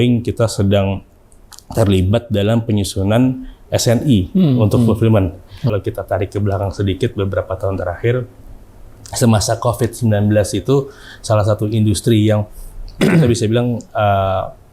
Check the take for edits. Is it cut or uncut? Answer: cut